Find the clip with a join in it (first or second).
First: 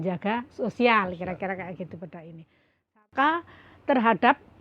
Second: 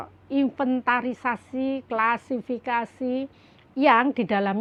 first